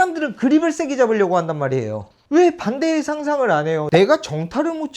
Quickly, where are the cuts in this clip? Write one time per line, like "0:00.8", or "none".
0:03.8